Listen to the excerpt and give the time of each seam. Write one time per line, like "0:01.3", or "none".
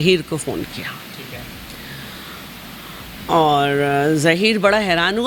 none